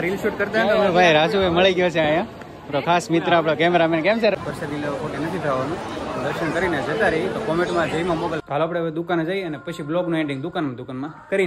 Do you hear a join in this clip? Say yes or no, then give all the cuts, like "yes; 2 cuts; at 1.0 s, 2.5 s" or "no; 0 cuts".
yes; 2 cuts; at 4.3 s, 8.4 s